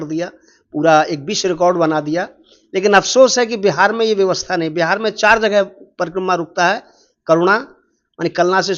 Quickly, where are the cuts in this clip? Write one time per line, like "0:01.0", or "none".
none